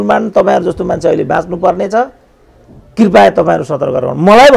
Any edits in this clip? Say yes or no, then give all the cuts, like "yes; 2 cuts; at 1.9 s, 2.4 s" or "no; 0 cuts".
no; 0 cuts